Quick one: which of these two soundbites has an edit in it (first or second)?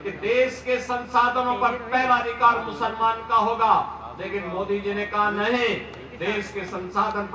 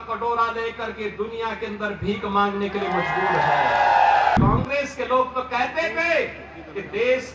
second